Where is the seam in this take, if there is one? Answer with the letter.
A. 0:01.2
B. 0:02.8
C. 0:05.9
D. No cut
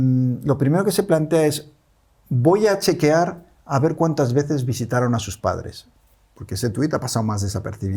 D